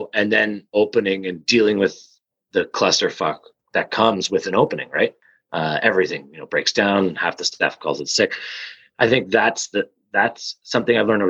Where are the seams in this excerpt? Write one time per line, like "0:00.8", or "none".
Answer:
0:03.5